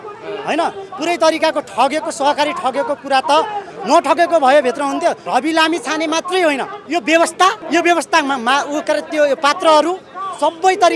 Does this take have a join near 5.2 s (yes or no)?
yes